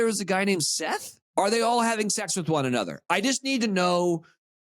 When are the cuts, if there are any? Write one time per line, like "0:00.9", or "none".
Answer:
0:01.1

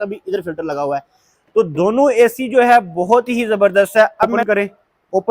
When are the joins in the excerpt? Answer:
0:04.4

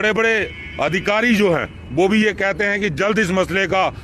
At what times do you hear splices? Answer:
0:01.1

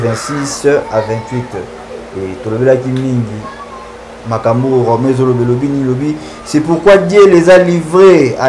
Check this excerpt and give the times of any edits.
none

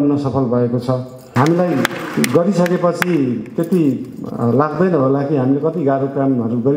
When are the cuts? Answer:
0:01.2

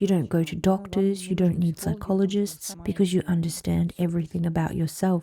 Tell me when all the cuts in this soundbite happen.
0:02.7

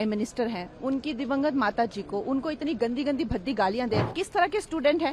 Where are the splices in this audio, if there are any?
0:04.2

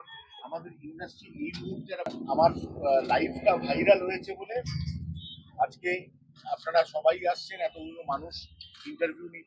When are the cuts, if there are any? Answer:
0:02.2

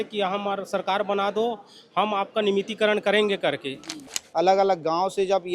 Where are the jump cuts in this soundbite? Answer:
0:04.1

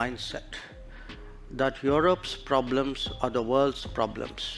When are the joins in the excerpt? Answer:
none

